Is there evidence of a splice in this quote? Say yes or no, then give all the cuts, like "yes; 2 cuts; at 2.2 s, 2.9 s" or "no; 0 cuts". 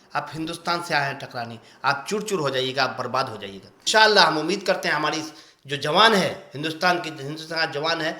yes; 1 cut; at 3.7 s